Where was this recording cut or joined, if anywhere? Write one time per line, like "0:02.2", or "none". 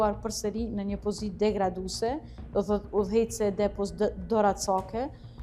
none